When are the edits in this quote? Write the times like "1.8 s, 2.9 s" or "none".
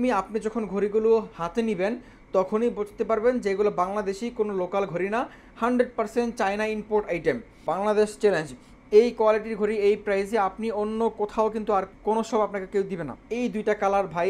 7.7 s, 11.9 s, 13.2 s